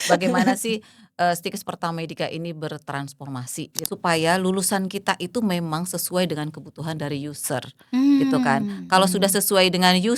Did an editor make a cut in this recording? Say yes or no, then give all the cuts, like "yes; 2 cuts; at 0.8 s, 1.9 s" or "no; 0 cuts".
yes; 1 cut; at 3.7 s